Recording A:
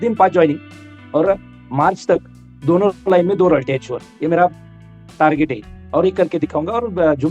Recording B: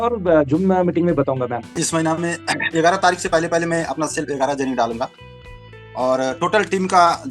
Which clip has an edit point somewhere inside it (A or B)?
B